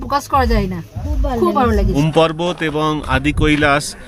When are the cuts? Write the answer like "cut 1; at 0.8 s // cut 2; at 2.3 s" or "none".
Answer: cut 1; at 1.9 s